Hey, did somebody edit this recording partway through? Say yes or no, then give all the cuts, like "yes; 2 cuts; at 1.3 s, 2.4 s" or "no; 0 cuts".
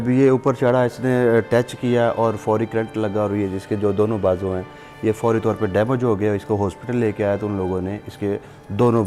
no; 0 cuts